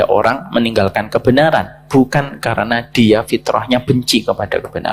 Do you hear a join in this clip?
no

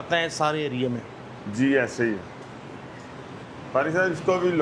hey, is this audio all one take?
yes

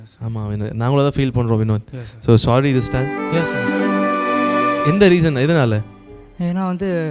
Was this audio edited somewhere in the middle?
yes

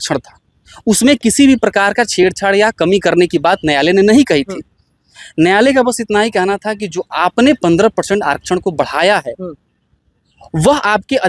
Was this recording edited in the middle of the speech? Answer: no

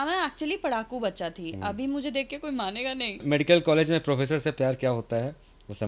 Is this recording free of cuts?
no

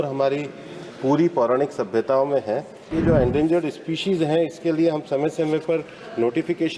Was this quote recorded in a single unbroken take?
no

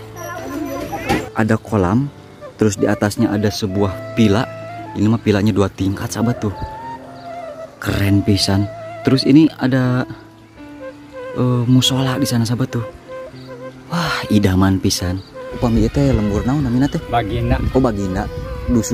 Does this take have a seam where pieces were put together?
yes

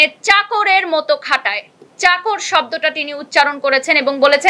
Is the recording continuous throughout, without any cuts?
yes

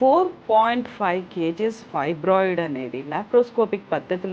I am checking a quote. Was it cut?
no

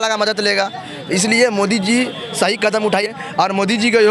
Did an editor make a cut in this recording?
yes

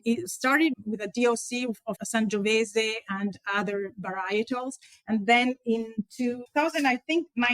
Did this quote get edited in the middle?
yes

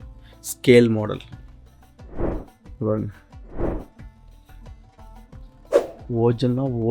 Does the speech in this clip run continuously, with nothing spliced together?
yes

